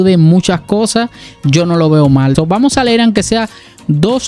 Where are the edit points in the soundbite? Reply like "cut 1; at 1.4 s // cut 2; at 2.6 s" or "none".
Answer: cut 1; at 2.3 s